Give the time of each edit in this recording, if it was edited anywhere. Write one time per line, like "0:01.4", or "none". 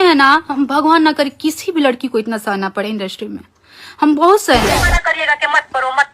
0:04.8

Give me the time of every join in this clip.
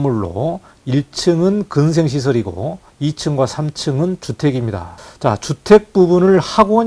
0:02.8
0:04.9

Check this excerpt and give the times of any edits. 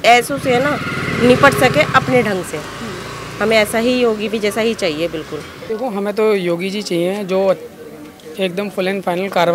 0:05.6

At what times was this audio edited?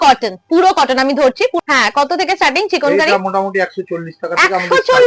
0:01.6

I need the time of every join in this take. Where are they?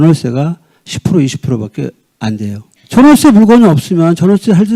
none

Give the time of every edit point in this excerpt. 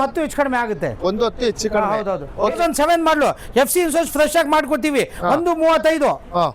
0:02.7

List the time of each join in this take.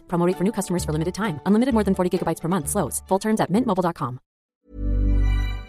0:04.6

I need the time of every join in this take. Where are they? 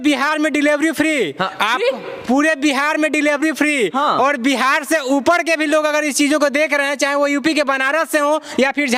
none

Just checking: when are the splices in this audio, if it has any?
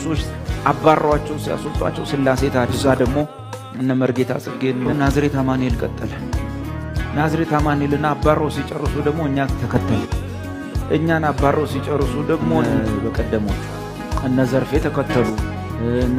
0:02.8
0:04.9
0:12.6

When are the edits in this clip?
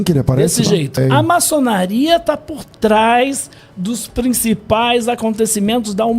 0:01.0

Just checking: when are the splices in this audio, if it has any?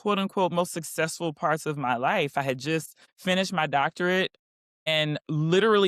none

